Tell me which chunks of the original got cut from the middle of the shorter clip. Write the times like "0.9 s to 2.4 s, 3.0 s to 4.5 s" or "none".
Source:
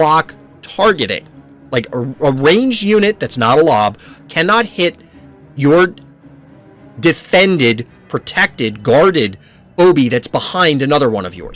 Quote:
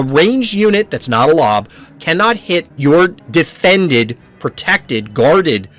5.0 s to 5.5 s, 6.0 s to 6.9 s